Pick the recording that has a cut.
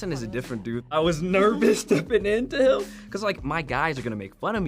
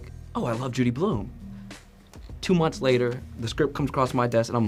first; 1 cut; at 0.9 s

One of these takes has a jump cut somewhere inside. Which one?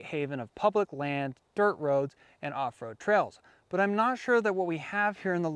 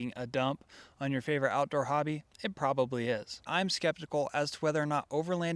second; 2 cuts; at 2.2 s, 3.4 s

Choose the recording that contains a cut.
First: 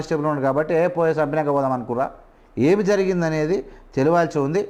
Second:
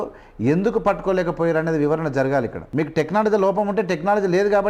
second; 1 cut; at 2.6 s

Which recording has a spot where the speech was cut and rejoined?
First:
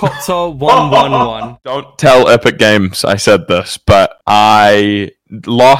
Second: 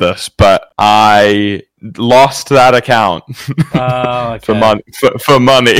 first; 1 cut; at 1.9 s

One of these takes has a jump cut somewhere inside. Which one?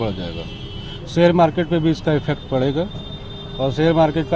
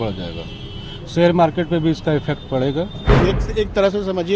second; 1 cut; at 3.2 s

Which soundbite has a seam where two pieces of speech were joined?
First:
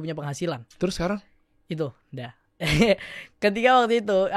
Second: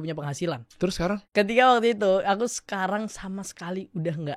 second; 1 cut; at 1.2 s

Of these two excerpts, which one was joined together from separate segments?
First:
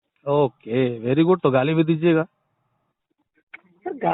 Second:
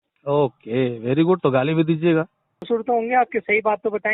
second; 1 cut; at 2.7 s

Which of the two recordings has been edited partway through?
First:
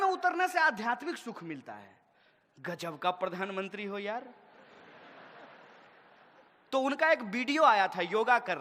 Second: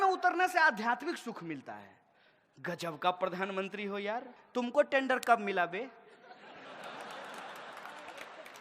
second; 1 cut; at 4.3 s

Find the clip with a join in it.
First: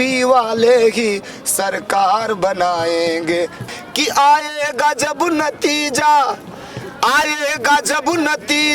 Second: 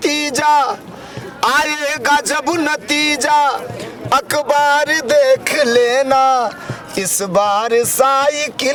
first; 1 cut; at 3.6 s

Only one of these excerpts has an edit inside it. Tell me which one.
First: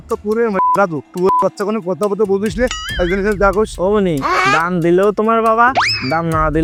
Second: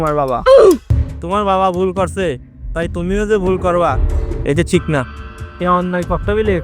second; 1 cut; at 1.0 s

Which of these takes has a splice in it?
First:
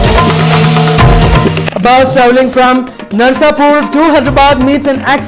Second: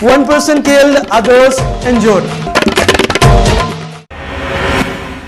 first; 1 cut; at 1.3 s

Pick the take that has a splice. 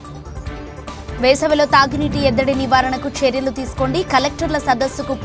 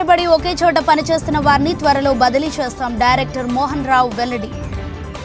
first; 1 cut; at 1.0 s

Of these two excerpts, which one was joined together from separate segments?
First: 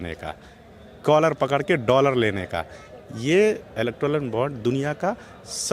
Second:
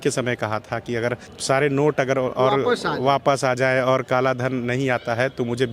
second; 1 cut; at 1.3 s

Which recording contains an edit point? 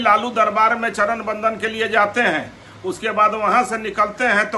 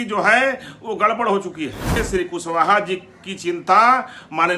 second; 1 cut; at 2.0 s

